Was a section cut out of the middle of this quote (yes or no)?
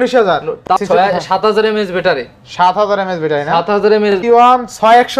yes